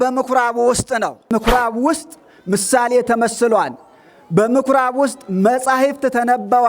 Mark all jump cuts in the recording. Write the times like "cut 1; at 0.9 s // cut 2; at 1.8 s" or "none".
cut 1; at 1.3 s